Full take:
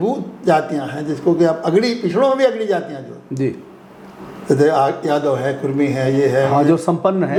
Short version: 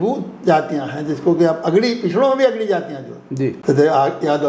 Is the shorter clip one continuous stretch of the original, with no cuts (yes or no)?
no